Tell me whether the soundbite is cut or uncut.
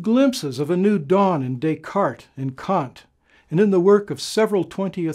uncut